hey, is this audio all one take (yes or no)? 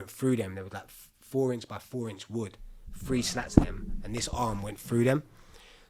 yes